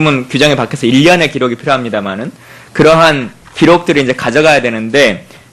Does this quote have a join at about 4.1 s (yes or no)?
no